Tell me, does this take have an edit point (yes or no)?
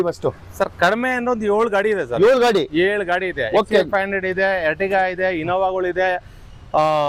no